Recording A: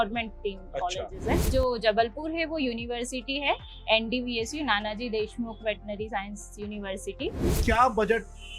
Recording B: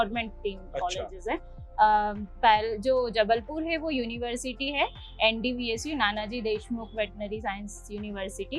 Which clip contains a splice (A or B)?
A